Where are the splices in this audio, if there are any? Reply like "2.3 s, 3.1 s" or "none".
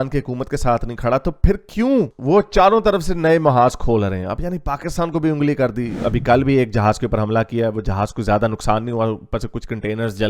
6.0 s